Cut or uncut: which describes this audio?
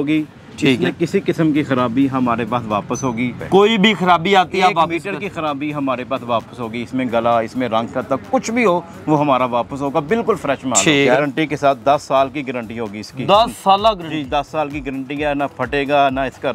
cut